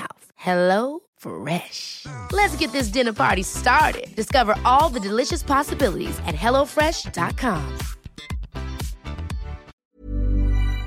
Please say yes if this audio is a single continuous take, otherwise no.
no